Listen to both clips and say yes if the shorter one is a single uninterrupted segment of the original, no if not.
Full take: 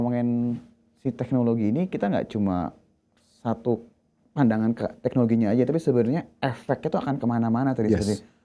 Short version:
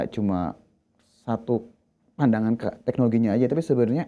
yes